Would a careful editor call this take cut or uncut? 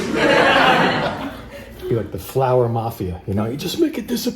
cut